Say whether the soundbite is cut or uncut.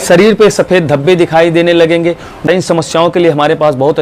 cut